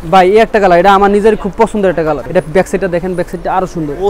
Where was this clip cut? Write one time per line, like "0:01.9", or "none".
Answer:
0:02.2